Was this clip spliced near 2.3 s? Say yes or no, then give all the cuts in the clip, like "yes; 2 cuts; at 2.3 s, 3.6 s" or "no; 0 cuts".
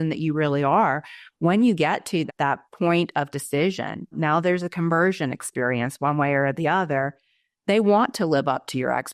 yes; 2 cuts; at 2.3 s, 4.1 s